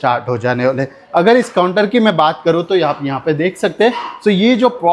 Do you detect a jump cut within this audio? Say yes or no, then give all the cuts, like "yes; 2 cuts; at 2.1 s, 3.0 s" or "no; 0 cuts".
no; 0 cuts